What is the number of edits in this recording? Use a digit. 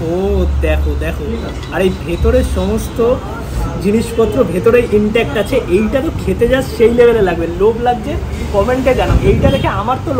0